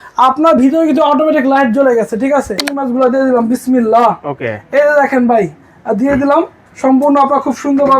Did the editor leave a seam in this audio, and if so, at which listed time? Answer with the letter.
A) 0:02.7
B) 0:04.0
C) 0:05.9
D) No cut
A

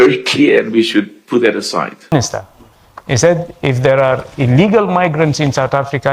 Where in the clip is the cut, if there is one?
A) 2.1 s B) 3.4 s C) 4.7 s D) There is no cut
A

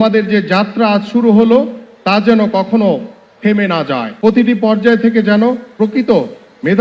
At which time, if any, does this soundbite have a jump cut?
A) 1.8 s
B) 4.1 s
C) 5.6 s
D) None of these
B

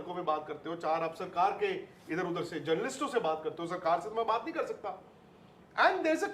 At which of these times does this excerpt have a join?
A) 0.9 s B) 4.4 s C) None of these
B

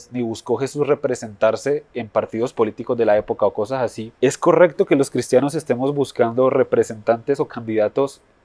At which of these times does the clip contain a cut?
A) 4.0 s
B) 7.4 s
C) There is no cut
A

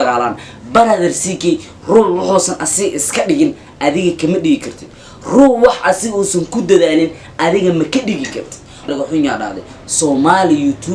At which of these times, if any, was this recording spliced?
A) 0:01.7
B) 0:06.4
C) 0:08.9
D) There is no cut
C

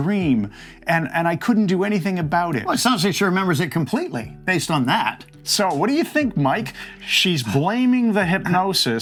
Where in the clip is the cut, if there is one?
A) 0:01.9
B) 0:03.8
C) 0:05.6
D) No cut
D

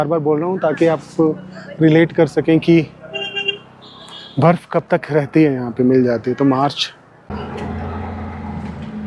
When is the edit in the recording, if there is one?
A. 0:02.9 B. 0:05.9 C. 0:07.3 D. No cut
C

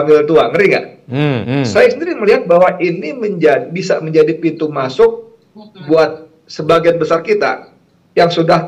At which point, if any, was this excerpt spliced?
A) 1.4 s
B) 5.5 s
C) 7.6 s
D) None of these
A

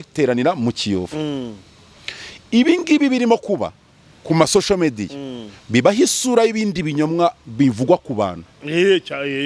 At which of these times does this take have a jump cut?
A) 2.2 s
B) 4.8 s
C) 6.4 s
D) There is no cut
D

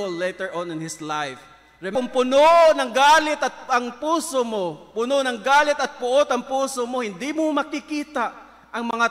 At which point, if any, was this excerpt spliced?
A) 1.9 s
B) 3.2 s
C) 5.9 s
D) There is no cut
A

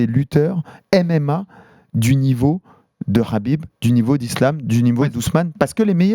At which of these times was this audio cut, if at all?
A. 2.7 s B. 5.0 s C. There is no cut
C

